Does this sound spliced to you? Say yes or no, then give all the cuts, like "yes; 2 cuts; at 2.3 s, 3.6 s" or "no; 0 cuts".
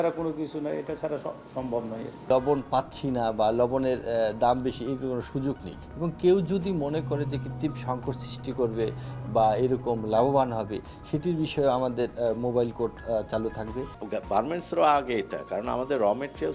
yes; 2 cuts; at 2.3 s, 13.9 s